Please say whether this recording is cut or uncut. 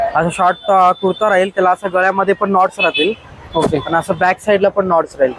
uncut